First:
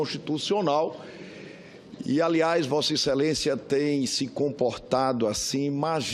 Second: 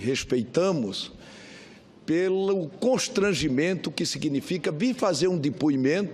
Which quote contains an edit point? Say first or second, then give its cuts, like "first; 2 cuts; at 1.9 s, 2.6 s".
second; 1 cut; at 5.0 s